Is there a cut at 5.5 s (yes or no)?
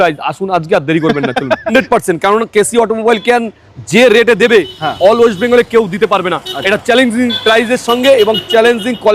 no